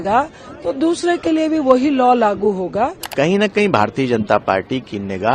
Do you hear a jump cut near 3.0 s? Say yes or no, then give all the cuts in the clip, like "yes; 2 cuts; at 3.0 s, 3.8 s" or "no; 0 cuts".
yes; 1 cut; at 3.0 s